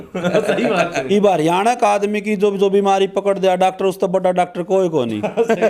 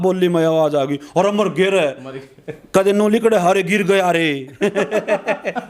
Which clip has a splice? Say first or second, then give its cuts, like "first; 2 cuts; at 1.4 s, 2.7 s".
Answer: first; 1 cut; at 1.0 s